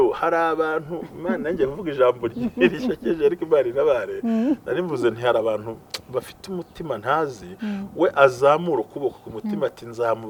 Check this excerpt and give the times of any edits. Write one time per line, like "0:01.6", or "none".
none